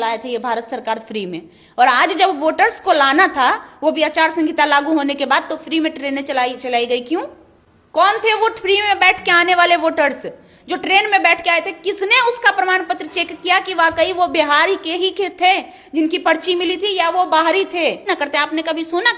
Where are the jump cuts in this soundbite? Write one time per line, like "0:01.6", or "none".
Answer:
0:18.1